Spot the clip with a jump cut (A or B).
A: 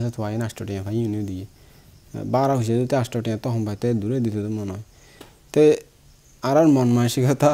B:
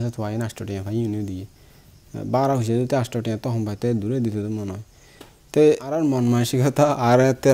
B